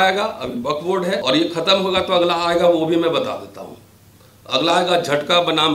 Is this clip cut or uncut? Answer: cut